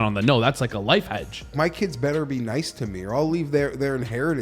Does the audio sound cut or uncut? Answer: cut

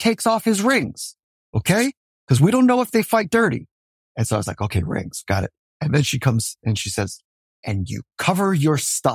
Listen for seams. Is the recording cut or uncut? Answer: cut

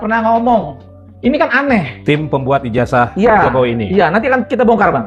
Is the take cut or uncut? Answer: uncut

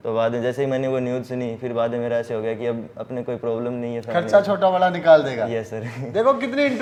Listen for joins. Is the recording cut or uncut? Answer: uncut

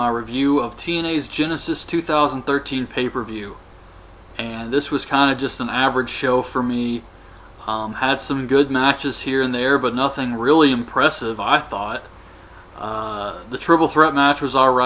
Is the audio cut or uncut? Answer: cut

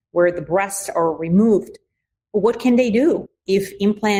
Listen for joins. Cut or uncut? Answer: uncut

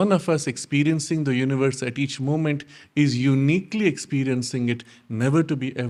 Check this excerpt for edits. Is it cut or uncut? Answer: uncut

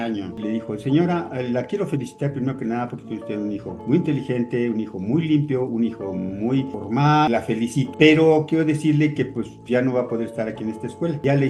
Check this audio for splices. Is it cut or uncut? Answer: uncut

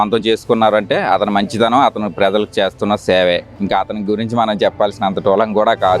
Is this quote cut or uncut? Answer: uncut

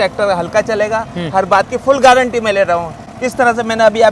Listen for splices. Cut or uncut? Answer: uncut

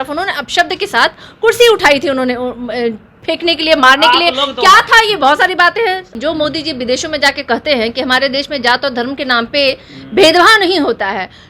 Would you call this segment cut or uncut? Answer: cut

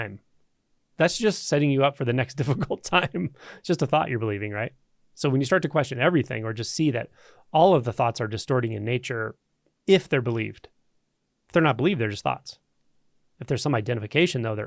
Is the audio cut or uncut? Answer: uncut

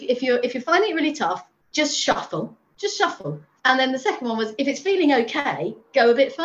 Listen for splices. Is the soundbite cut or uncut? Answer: cut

